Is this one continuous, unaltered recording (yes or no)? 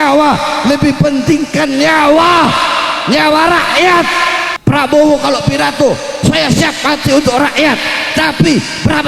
no